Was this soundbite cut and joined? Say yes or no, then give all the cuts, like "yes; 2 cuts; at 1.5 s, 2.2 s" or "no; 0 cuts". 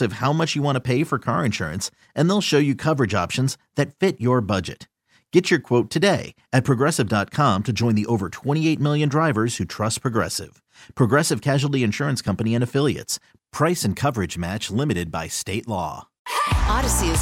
no; 0 cuts